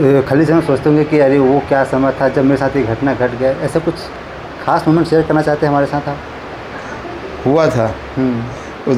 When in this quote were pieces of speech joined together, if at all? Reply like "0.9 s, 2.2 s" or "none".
none